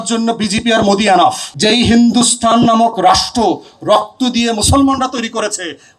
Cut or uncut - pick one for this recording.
cut